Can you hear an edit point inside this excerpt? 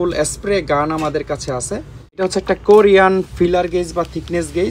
yes; 1 cut; at 2.2 s

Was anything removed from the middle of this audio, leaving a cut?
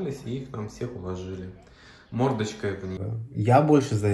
yes; 1 cut; at 3.2 s

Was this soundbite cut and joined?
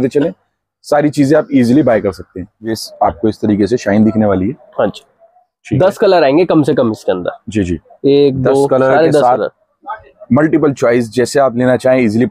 yes; 1 cut; at 2.8 s

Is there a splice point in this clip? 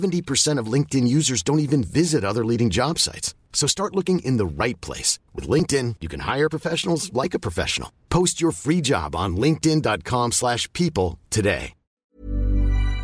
yes; 1 cut; at 11.9 s

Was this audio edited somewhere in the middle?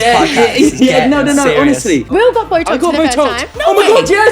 yes; 1 cut; at 2.1 s

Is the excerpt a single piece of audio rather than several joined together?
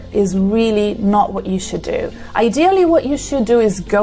yes; 0 cuts

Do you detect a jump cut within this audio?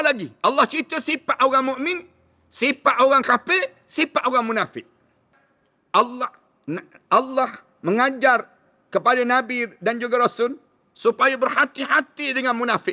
yes; 1 cut; at 5.4 s

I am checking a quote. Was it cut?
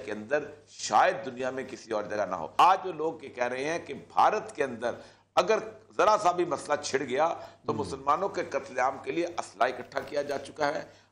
no; 0 cuts

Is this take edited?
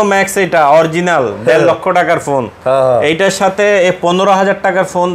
no; 0 cuts

